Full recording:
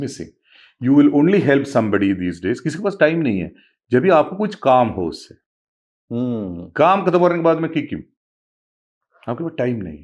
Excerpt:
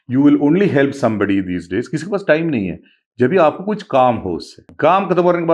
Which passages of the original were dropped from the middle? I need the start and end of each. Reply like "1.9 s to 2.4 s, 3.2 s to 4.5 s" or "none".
5.3 s to 6.6 s